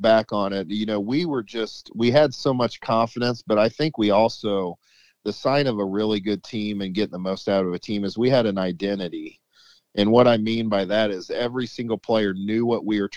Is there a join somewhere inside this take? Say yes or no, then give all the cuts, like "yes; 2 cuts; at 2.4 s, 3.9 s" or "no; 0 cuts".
no; 0 cuts